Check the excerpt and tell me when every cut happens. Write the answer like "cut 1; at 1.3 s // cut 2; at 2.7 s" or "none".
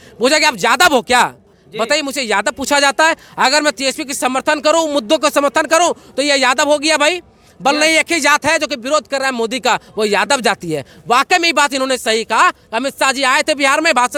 none